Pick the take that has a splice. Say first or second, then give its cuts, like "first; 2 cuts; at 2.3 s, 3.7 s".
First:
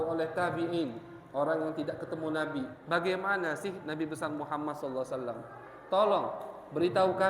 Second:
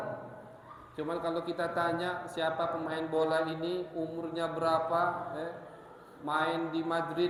first; 1 cut; at 2.8 s